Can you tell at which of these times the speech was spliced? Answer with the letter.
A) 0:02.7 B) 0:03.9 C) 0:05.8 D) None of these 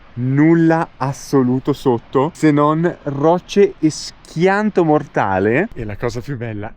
C